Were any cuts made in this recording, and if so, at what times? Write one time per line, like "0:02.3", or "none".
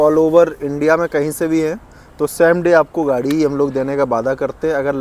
none

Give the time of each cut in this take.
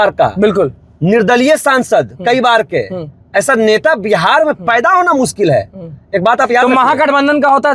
none

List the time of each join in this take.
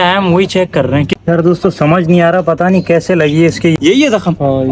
0:01.2
0:03.8

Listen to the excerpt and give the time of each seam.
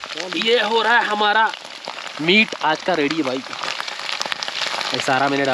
none

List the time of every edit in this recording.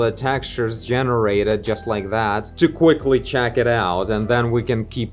none

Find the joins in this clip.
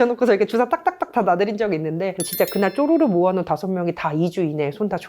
0:02.1

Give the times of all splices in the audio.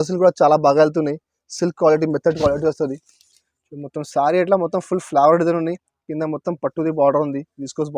none

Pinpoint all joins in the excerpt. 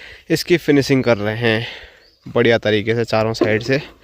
none

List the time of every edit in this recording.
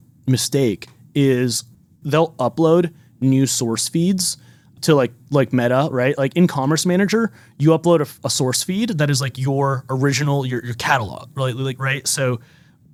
none

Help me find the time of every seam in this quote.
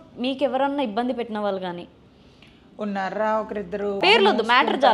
0:04.0

